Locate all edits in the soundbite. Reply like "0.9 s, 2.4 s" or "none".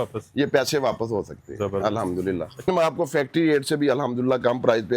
2.7 s